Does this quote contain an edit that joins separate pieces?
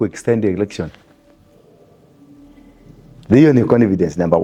no; 0 cuts

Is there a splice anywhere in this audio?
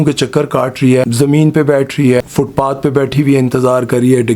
yes; 2 cuts; at 1.0 s, 2.2 s

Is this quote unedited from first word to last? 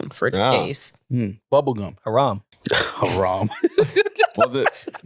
no; 1 cut; at 2.5 s

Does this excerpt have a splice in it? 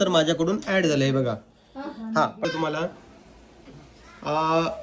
yes; 1 cut; at 2.4 s

